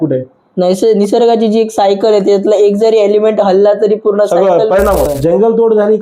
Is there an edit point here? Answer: yes; 1 cut; at 5.1 s

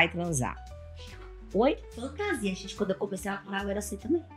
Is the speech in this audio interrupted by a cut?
no; 0 cuts

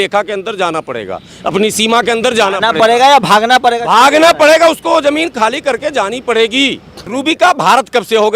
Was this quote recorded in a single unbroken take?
no; 1 cut; at 7.1 s

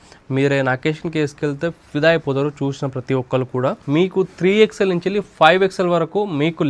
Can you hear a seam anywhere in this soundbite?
yes; 1 cut; at 3.8 s

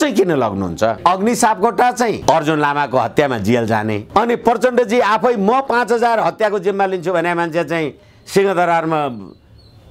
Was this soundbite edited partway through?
yes; 3 cuts; at 1.0 s, 2.2 s, 4.0 s

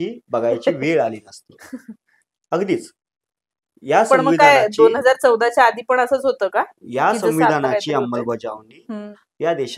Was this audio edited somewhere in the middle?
no; 0 cuts

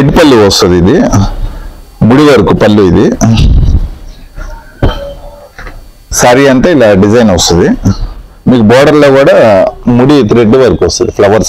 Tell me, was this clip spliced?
no; 0 cuts

